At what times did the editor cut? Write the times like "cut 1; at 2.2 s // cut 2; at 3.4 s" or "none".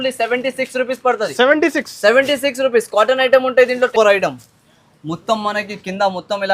cut 1; at 3.9 s